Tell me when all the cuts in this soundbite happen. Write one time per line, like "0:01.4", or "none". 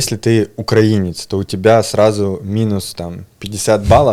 none